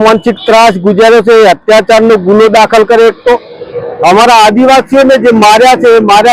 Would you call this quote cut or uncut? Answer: uncut